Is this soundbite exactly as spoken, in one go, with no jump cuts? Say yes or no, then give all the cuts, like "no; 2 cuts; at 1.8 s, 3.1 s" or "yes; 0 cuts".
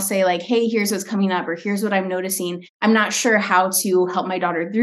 no; 1 cut; at 2.6 s